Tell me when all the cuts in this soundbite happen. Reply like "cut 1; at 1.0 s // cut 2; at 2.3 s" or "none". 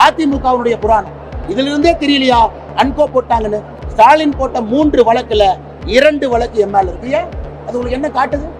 cut 1; at 3.7 s